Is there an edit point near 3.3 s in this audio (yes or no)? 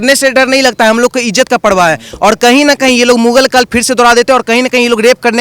no